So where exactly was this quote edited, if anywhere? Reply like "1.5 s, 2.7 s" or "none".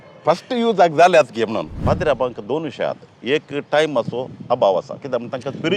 1.7 s